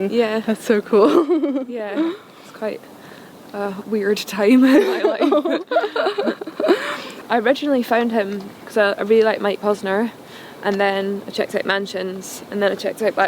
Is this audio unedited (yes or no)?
no